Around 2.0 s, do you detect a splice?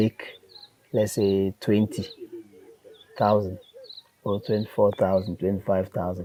no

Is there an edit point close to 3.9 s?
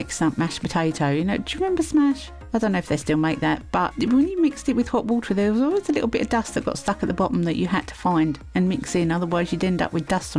yes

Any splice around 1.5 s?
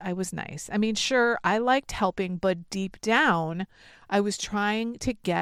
no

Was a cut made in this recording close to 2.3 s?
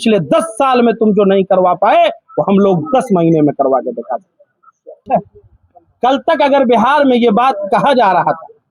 no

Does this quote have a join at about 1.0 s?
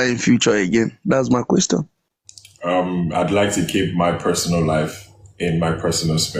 no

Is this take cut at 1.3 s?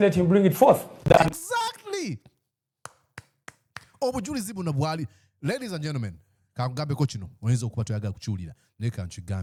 no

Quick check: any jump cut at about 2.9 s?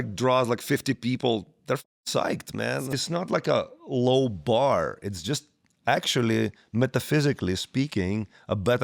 yes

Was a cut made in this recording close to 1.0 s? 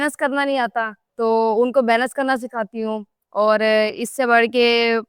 yes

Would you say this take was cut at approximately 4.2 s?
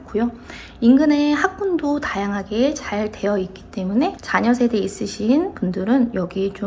yes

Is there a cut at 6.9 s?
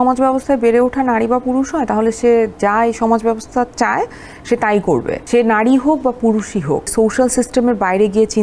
yes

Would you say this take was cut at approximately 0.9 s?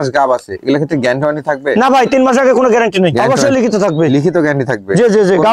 no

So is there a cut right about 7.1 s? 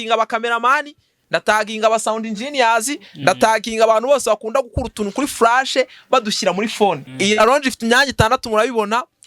yes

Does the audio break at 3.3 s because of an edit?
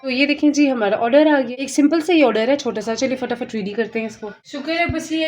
no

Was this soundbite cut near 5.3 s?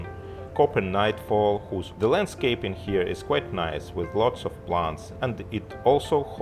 no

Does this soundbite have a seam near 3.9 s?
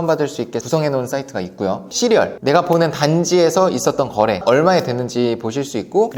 no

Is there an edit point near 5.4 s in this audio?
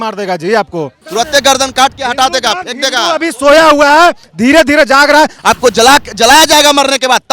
yes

